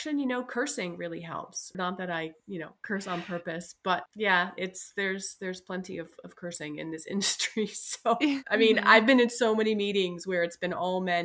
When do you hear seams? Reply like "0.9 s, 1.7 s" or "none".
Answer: 1.7 s, 4.0 s, 8.4 s